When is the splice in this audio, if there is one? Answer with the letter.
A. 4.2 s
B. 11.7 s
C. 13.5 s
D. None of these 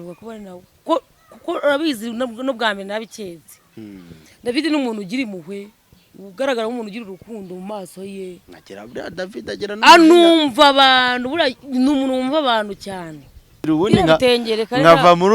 C